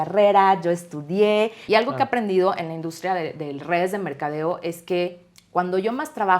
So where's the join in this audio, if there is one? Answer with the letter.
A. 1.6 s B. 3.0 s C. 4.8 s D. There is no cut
A